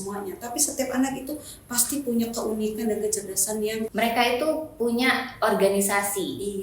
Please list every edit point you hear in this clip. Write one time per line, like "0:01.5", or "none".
0:03.9